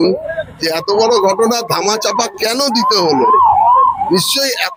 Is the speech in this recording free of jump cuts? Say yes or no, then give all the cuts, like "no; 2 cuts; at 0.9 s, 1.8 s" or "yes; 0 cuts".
yes; 0 cuts